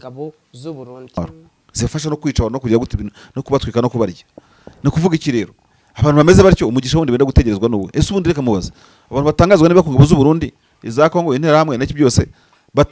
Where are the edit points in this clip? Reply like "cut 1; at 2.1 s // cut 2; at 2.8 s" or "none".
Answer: cut 1; at 1.2 s